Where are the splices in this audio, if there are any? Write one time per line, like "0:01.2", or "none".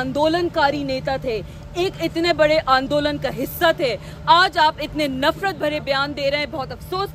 none